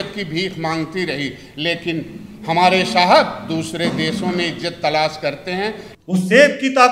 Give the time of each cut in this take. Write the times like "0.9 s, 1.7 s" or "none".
5.9 s